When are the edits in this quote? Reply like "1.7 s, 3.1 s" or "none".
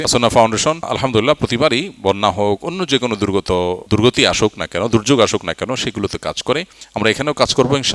0.9 s, 3.8 s, 6.8 s